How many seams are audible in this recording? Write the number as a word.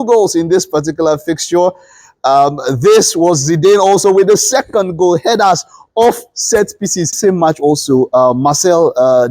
one